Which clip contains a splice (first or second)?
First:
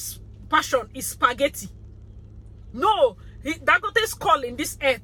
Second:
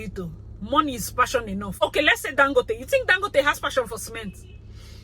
second